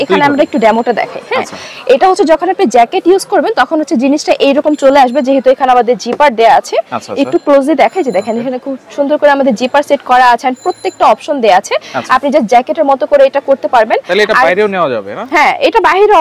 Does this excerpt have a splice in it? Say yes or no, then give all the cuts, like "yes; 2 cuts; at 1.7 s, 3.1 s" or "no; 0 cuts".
no; 0 cuts